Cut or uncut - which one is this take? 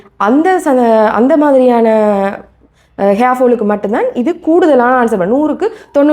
uncut